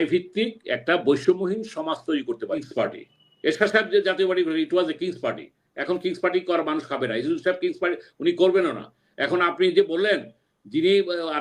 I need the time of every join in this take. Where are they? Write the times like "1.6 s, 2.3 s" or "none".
2.7 s